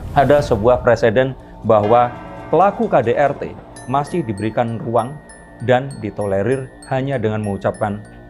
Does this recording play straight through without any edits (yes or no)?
yes